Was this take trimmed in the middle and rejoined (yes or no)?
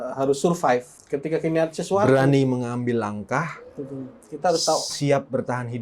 yes